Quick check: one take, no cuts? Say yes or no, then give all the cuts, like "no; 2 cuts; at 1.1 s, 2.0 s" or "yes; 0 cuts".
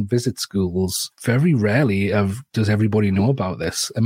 no; 1 cut; at 1.0 s